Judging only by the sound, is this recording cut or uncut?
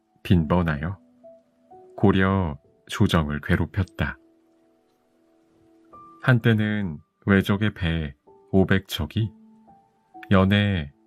uncut